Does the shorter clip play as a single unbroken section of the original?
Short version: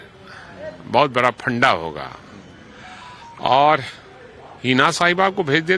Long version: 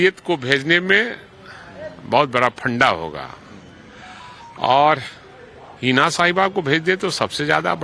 yes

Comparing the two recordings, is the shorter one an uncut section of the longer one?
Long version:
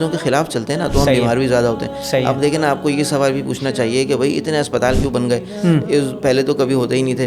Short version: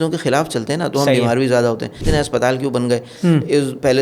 no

